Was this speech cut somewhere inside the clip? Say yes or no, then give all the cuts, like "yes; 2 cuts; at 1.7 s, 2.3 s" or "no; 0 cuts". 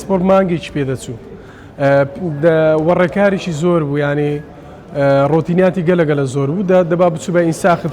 no; 0 cuts